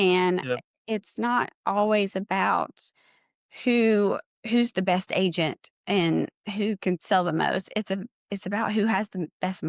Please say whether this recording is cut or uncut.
uncut